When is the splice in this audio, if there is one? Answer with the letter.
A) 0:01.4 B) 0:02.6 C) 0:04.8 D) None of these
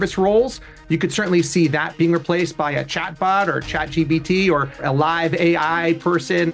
C